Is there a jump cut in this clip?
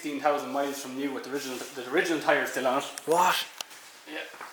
no; 0 cuts

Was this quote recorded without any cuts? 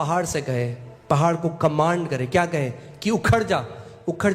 yes; 0 cuts

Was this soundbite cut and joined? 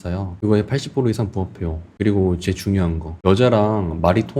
yes; 2 cuts; at 1.8 s, 3.1 s

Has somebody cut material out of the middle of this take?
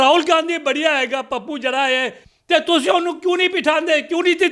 yes; 1 cut; at 2.2 s

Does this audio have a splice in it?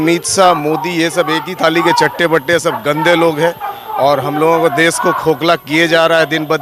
no; 0 cuts

